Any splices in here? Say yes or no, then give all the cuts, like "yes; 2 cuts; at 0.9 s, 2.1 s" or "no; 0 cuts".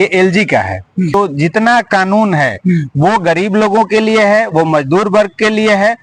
yes; 1 cut; at 1.1 s